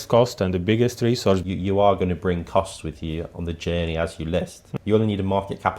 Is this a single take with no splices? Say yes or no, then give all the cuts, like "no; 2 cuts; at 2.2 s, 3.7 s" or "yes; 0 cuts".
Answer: no; 2 cuts; at 1.4 s, 4.6 s